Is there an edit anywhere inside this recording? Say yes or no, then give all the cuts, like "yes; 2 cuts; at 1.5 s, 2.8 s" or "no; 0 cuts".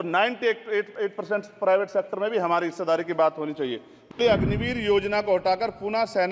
yes; 1 cut; at 4.1 s